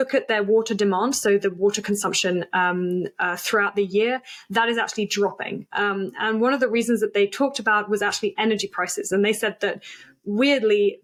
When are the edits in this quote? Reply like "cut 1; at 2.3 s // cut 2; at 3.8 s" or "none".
none